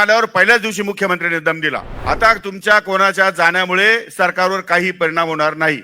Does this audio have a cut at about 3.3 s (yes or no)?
no